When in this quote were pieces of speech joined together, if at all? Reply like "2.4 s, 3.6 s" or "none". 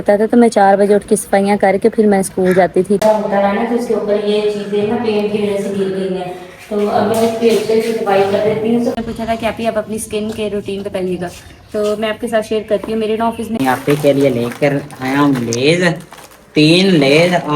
3.0 s, 8.9 s, 13.6 s